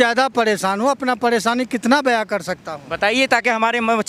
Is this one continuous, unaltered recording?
yes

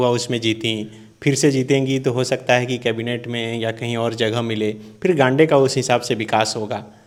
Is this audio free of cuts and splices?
yes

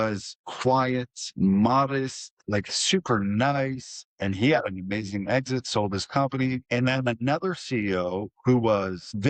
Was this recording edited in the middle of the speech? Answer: no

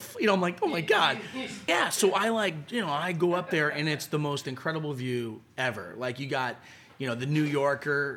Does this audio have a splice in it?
yes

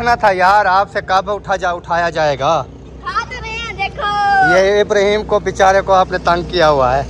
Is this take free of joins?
yes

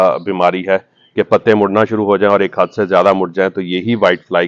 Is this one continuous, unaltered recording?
yes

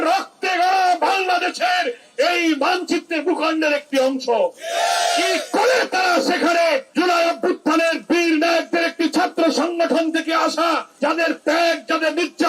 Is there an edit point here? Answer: yes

